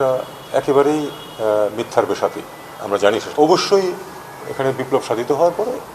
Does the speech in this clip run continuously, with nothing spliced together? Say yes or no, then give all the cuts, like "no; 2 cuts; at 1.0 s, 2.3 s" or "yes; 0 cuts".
no; 1 cut; at 3.2 s